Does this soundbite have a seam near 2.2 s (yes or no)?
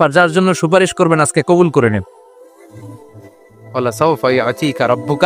yes